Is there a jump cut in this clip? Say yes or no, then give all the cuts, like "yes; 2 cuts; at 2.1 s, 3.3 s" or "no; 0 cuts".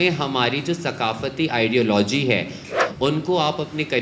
yes; 1 cut; at 2.7 s